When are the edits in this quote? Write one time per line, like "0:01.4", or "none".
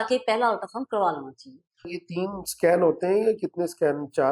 0:02.0